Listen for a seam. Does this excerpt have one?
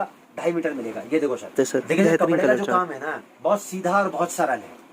yes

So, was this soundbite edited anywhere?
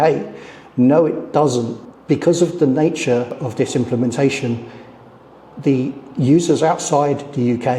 yes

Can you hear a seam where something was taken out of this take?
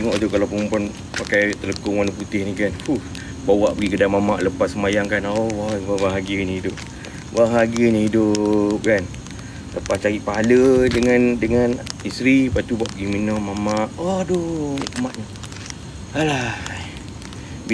no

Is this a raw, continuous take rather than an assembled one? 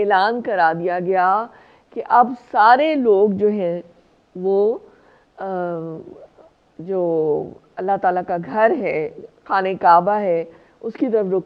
yes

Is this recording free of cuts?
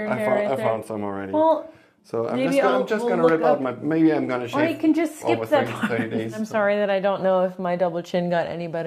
no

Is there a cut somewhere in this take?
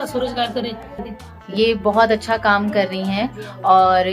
yes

